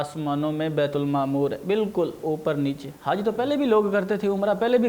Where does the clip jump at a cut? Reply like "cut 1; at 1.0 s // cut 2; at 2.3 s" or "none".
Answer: cut 1; at 2.9 s